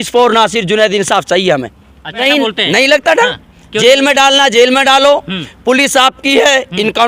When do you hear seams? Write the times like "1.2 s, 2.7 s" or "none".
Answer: 2.2 s